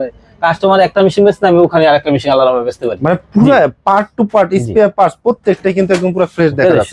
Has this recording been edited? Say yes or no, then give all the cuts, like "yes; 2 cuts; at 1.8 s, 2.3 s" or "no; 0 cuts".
no; 0 cuts